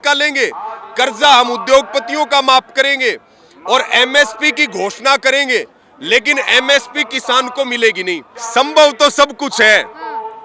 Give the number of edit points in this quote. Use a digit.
1